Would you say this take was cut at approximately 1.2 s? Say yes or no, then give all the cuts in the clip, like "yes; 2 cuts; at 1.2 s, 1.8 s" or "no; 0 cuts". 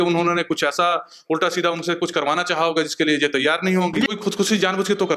no; 1 cut; at 4.1 s